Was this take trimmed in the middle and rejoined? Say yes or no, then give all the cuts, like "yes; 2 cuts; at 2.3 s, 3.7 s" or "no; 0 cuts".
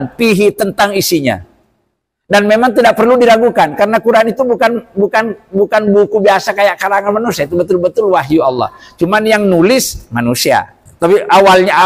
yes; 1 cut; at 10.9 s